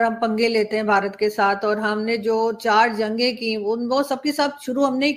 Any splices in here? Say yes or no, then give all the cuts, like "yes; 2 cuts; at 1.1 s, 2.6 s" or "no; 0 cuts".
no; 0 cuts